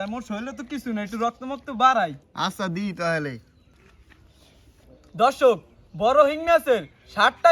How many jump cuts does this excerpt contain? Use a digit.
0